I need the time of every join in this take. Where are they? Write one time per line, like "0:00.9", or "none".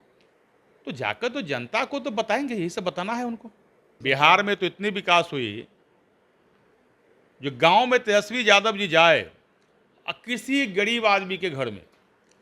0:03.9